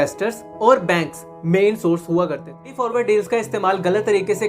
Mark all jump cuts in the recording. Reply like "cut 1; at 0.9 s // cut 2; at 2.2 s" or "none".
cut 1; at 2.8 s